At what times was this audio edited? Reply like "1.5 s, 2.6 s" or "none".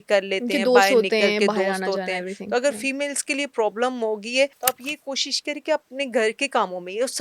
4.6 s